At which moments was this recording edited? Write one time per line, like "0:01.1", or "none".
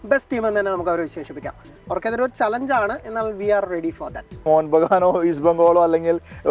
0:01.7
0:04.4